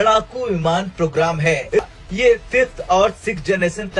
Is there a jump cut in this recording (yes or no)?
yes